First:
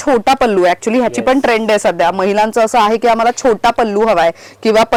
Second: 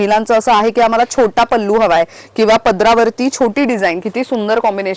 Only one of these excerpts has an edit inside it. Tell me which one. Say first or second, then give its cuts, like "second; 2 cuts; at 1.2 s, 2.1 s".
second; 1 cut; at 4.0 s